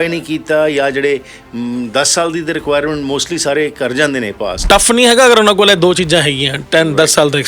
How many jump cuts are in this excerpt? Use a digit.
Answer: 1